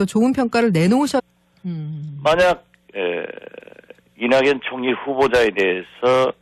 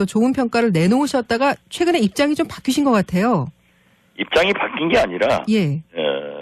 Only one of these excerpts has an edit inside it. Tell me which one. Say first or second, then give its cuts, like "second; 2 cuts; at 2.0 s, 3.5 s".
second; 1 cut; at 1.2 s